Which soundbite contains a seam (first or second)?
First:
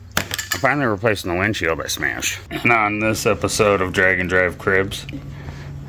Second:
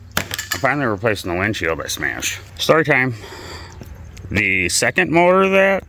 first